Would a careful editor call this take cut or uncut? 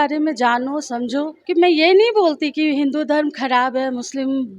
cut